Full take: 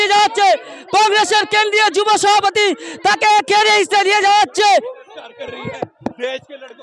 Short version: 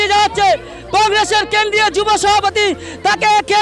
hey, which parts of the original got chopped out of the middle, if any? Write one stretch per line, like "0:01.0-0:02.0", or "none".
none